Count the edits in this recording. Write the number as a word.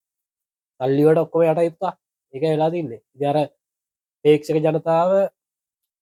zero